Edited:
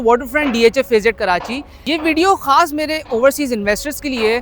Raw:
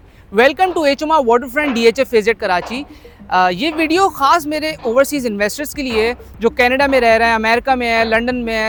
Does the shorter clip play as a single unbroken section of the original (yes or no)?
no